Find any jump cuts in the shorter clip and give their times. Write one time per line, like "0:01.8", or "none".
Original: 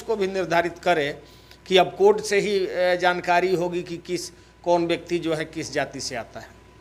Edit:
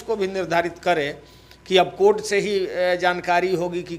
none